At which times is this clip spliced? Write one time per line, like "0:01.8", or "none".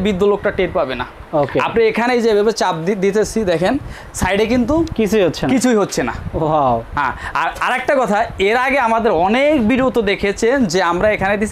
none